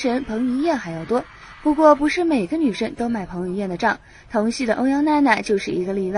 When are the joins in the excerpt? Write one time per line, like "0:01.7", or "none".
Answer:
0:02.3